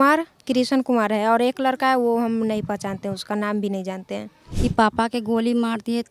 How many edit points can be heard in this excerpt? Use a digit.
1